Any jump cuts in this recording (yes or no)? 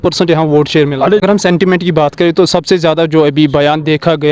yes